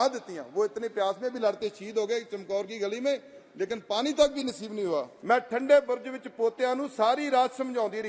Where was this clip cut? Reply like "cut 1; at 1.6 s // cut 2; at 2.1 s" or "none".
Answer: cut 1; at 5.1 s